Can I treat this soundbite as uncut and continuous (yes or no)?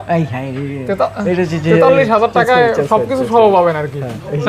yes